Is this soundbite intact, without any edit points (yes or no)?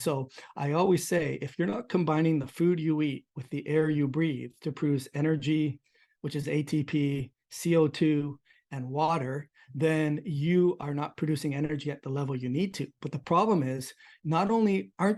yes